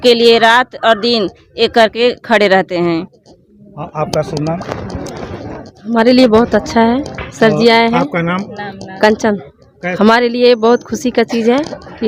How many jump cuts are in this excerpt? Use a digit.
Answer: 1